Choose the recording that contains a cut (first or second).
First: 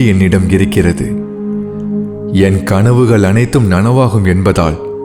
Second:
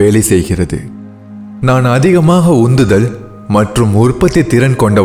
first